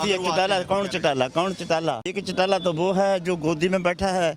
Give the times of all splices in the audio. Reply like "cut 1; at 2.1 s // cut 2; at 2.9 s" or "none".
cut 1; at 2.2 s